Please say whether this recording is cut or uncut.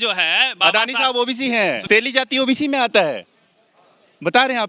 cut